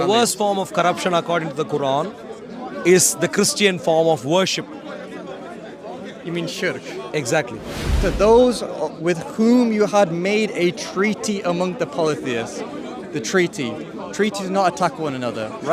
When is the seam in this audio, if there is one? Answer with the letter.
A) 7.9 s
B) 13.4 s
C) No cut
A